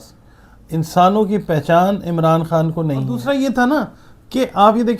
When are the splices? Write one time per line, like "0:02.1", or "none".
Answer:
0:03.1